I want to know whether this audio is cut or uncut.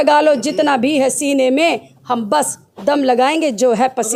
uncut